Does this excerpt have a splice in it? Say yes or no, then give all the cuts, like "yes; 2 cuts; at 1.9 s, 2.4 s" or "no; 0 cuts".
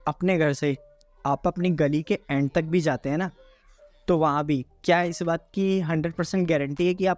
no; 0 cuts